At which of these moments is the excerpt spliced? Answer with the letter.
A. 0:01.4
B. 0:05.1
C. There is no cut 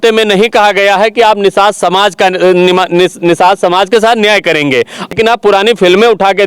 B